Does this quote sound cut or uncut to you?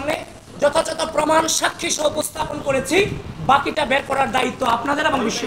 uncut